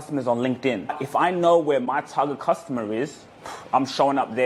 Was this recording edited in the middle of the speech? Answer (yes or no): yes